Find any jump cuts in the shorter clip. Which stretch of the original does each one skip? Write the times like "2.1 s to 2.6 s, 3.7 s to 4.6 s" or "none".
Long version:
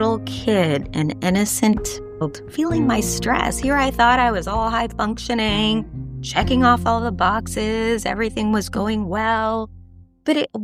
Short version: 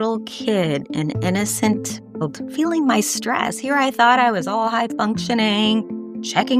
none